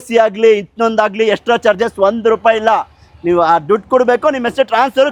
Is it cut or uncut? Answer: uncut